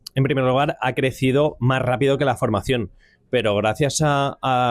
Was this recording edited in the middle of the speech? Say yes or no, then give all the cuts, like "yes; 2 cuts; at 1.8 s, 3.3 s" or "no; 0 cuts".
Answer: no; 0 cuts